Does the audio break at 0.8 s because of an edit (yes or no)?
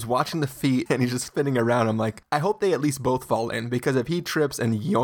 yes